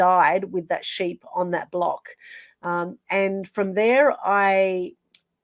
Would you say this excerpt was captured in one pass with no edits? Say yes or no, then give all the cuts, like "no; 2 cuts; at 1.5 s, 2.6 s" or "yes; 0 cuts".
yes; 0 cuts